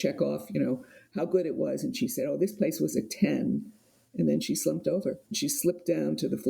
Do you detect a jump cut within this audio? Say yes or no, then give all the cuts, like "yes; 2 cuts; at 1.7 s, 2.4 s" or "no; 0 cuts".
yes; 1 cut; at 5.3 s